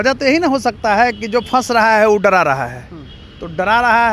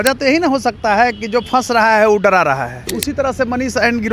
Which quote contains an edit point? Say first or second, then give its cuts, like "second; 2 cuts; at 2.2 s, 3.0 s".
second; 1 cut; at 2.9 s